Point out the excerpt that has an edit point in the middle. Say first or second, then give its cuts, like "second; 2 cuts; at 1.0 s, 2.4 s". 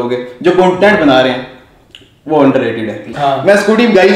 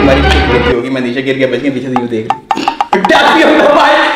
first; 1 cut; at 3.1 s